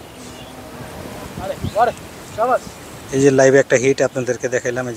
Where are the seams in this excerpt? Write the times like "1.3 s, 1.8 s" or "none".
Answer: 1.3 s